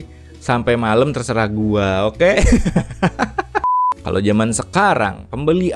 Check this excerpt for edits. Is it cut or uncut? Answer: cut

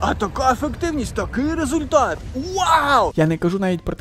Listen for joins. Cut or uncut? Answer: cut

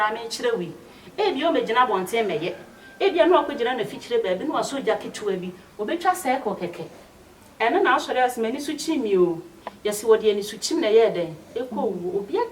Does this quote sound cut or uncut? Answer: uncut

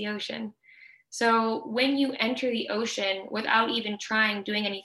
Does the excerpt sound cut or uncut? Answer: uncut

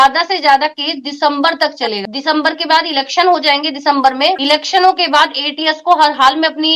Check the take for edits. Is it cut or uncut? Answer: cut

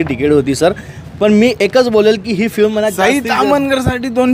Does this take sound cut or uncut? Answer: uncut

